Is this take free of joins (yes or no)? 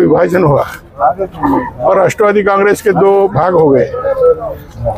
yes